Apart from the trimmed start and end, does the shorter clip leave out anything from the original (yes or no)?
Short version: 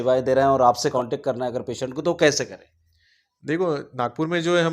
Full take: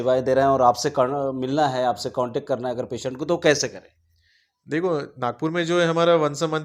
yes